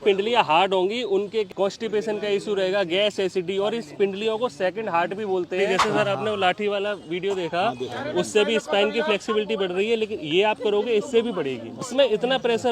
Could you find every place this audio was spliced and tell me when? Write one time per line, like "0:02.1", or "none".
0:01.5
0:05.6
0:11.9